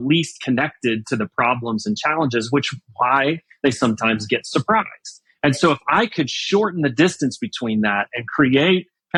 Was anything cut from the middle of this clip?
no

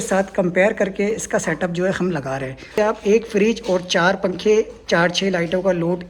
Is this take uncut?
no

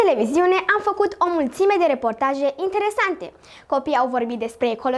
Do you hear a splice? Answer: no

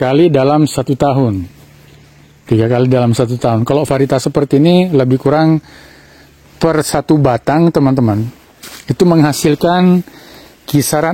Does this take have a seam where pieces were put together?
no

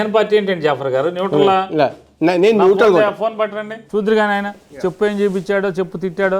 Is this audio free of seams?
no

